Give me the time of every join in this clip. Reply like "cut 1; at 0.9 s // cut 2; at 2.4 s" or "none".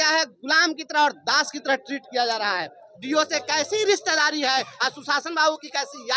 cut 1; at 2.9 s